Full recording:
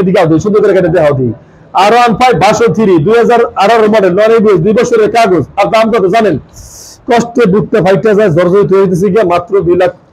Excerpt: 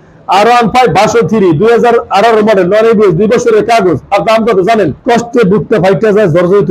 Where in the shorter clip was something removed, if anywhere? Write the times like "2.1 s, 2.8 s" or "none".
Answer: 5.0 s